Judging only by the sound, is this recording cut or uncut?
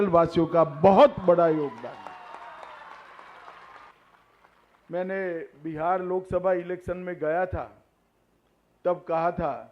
cut